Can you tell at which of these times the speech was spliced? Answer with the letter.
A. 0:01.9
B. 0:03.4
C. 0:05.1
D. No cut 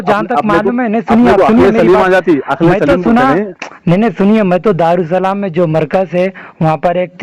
D